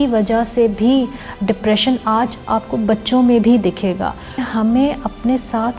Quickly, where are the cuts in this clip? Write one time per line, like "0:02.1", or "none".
0:04.4